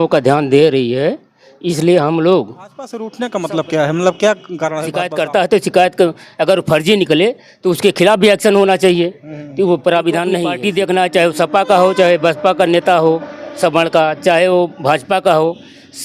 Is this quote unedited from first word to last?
no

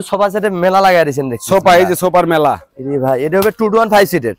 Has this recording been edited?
no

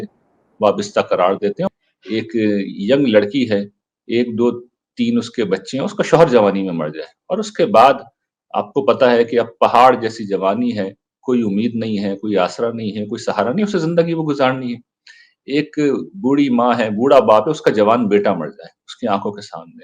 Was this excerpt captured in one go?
no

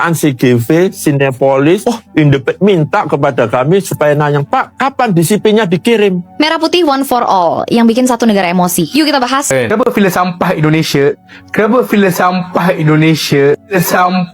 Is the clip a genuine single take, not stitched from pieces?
no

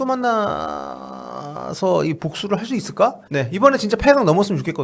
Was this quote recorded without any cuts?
no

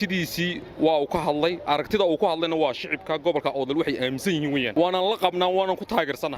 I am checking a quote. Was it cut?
yes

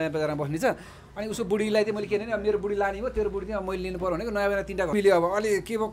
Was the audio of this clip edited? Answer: yes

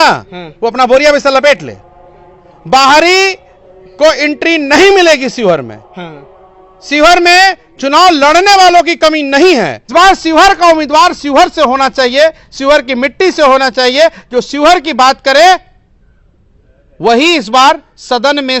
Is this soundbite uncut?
no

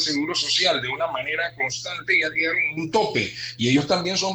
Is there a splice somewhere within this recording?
no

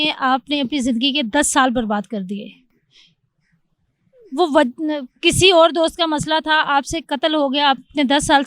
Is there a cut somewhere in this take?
no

